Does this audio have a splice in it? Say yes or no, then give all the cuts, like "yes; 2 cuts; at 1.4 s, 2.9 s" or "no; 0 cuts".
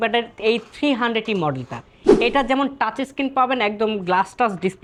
no; 0 cuts